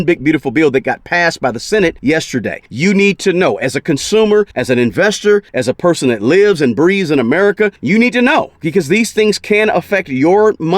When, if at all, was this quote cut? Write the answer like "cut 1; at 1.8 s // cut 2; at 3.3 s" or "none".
cut 1; at 2.2 s // cut 2; at 4.6 s // cut 3; at 5.5 s // cut 4; at 7.8 s